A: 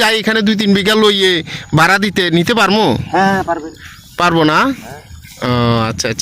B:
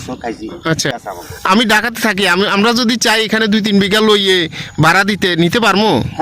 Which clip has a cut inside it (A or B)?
B